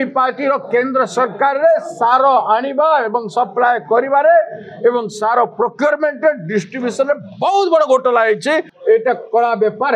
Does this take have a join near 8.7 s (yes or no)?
yes